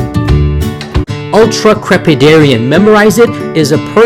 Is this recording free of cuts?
no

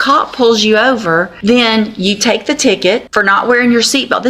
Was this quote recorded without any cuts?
no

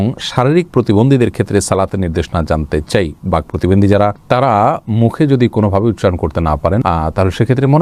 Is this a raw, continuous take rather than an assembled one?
yes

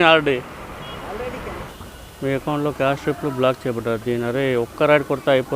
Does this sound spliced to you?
yes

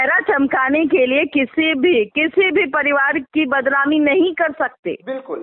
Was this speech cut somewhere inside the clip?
no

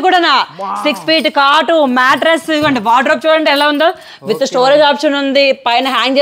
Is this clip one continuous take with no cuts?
yes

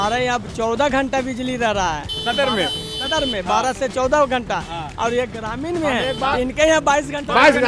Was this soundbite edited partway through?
no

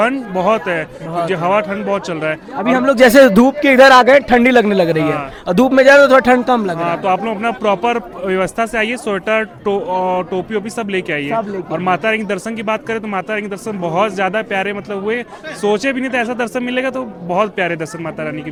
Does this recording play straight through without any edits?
yes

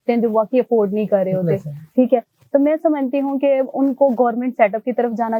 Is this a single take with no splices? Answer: yes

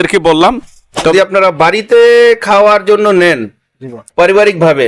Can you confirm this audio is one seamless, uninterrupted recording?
no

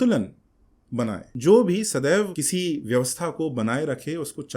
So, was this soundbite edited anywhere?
yes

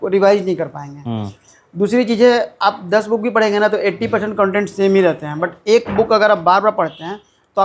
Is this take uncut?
yes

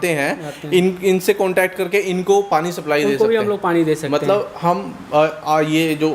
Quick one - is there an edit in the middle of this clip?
no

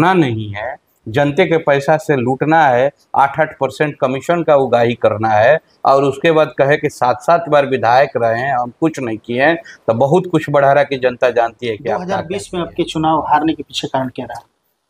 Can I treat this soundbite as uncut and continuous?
no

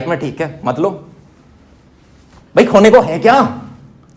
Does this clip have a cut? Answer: no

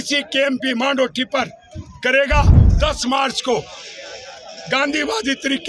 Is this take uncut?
no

